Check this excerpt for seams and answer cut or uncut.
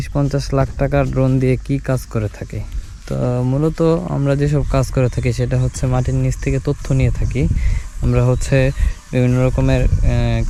uncut